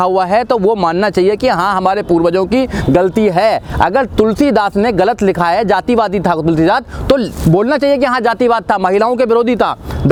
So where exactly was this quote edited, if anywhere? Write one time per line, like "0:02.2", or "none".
none